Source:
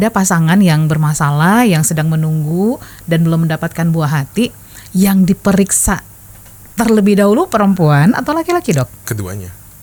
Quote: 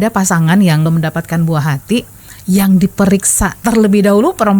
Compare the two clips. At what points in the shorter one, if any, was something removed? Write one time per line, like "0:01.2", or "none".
0:00.9
0:03.6